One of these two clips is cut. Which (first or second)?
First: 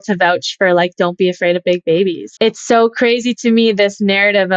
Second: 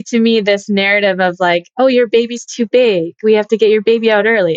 first